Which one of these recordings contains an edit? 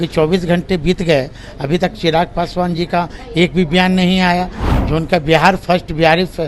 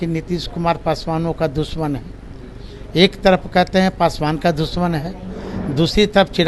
first; 1 cut; at 4.6 s

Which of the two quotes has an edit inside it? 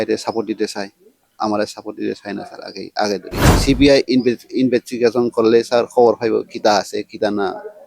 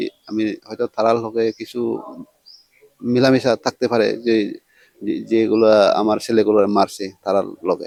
first; 1 cut; at 3.5 s

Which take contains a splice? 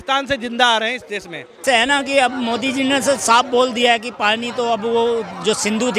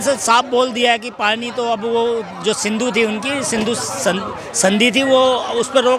first; 1 cut; at 1.4 s

